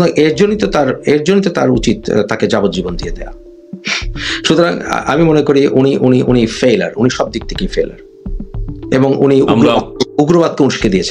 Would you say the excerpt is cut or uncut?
uncut